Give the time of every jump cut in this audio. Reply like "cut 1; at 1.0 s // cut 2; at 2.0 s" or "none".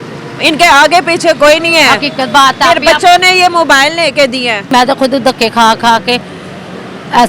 cut 1; at 4.7 s